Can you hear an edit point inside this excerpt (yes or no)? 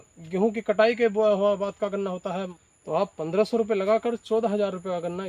yes